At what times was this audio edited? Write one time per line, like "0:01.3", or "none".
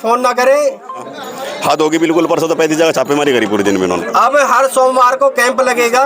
0:01.1
0:04.0